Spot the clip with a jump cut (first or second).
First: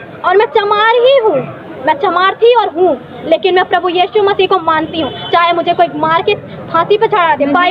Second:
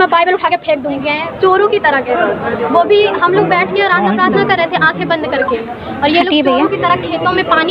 second